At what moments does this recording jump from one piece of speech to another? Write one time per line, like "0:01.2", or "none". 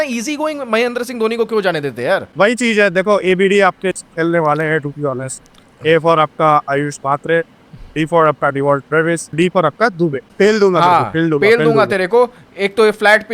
0:02.3
0:09.4
0:10.2